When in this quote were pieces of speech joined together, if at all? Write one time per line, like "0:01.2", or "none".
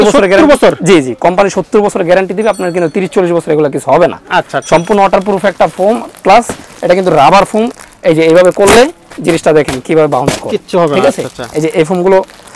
none